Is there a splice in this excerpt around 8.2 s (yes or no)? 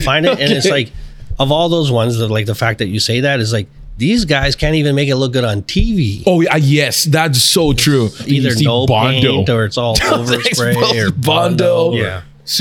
yes